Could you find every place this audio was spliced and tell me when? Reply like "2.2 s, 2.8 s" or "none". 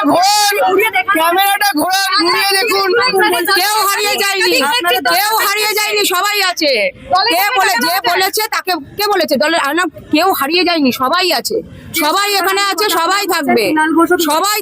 3.1 s